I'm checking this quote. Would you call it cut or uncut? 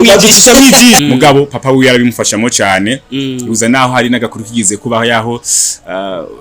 cut